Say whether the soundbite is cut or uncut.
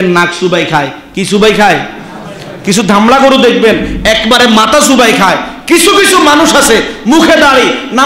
uncut